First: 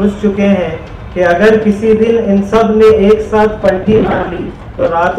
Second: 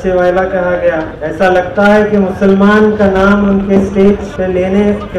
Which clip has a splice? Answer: second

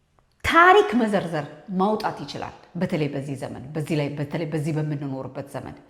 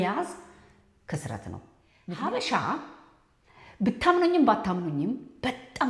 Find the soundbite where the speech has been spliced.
second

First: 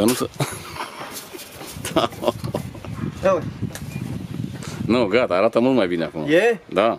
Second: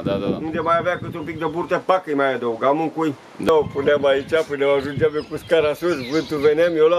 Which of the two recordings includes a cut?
second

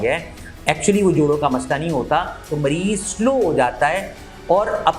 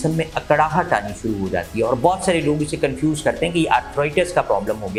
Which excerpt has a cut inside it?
first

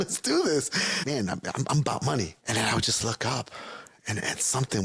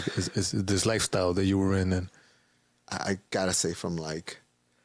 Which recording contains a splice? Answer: first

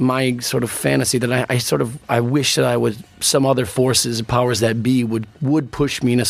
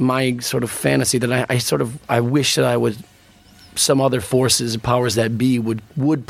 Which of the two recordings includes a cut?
first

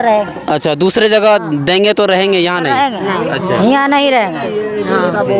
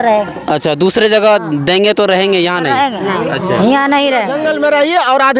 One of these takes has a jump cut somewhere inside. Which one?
second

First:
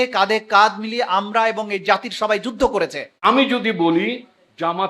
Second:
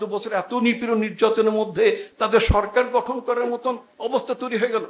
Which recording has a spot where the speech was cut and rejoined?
first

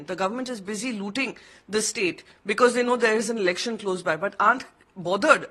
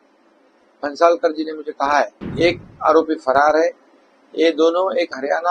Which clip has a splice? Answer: second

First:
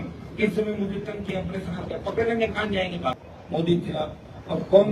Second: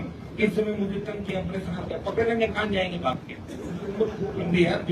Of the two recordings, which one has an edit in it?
first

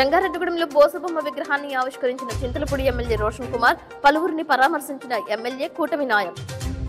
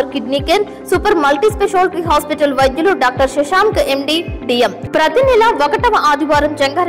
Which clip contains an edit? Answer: second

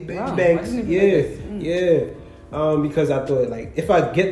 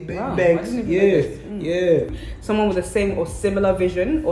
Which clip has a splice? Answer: second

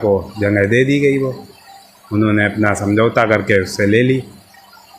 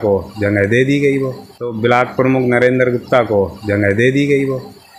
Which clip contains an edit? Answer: first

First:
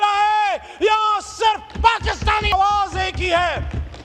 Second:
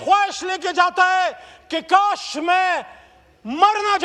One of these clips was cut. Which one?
first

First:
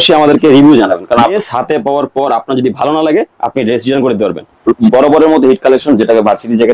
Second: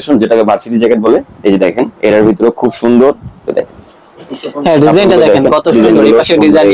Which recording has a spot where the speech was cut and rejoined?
first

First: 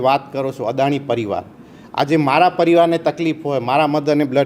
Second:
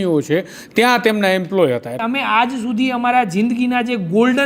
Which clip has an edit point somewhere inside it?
second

